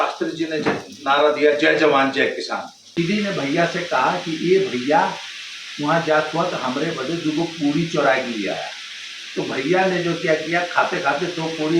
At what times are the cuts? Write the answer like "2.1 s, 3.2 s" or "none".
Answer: 3.0 s

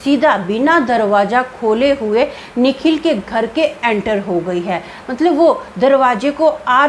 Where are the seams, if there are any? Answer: none

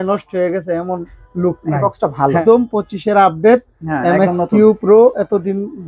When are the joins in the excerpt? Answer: 2.4 s

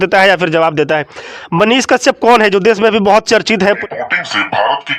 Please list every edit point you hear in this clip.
3.8 s

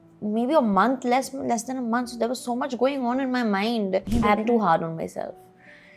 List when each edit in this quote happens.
4.1 s

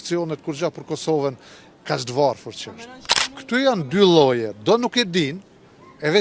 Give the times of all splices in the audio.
none

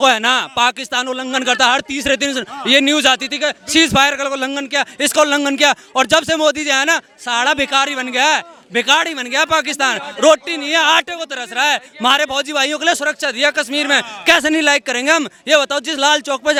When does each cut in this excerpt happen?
none

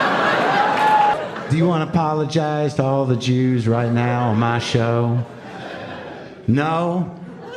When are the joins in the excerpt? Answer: 1.1 s

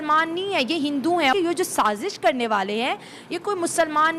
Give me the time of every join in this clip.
1.3 s

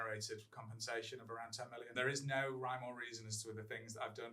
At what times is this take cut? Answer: 1.9 s

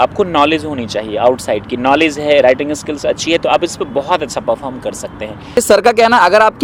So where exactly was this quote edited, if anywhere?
5.6 s

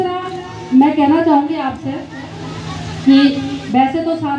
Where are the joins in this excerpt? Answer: none

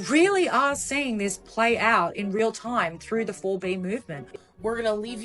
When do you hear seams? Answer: 4.2 s

